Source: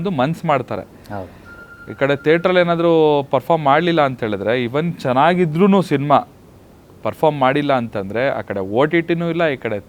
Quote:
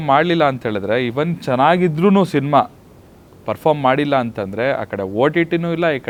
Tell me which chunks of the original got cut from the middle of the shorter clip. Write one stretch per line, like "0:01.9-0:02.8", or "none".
none